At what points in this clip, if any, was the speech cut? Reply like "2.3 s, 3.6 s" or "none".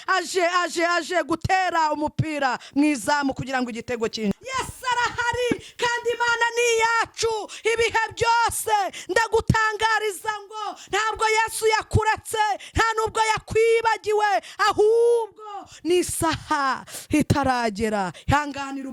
4.3 s